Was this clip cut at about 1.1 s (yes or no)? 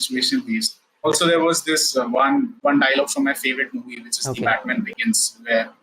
yes